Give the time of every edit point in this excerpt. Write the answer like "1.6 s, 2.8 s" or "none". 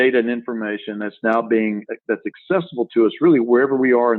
none